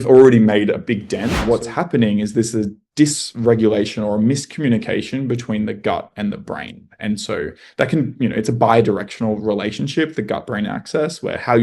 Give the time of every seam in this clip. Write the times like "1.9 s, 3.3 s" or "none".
1.4 s